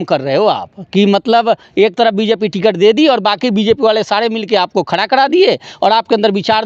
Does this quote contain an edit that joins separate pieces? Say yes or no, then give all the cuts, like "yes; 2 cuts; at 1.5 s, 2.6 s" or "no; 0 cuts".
no; 0 cuts